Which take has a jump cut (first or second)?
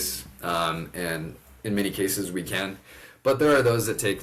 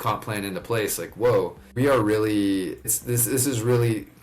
second